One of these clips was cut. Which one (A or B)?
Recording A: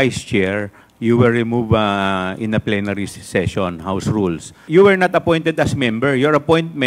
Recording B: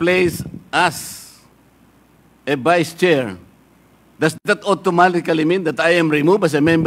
A